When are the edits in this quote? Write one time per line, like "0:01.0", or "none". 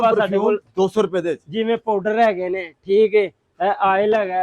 none